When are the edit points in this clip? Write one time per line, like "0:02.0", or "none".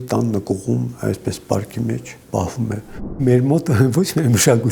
0:02.1
0:03.2